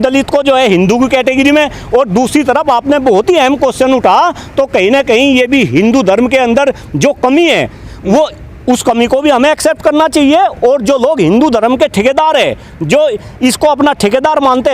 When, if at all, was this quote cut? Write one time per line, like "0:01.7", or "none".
none